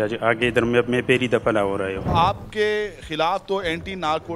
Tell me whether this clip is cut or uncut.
cut